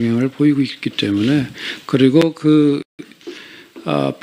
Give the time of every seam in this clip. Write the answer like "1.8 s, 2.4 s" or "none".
1.7 s